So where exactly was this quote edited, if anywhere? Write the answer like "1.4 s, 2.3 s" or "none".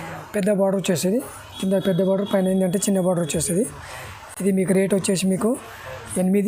none